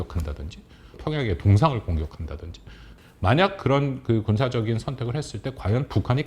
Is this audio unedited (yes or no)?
no